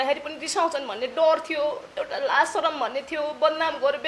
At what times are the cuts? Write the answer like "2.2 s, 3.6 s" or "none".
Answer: 1.9 s